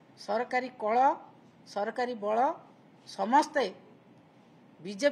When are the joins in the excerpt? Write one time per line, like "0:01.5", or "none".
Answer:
none